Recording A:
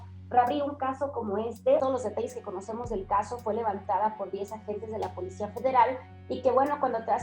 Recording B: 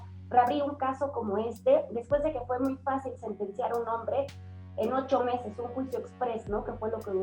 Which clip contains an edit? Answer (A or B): A